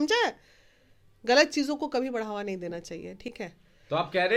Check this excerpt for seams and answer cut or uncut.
uncut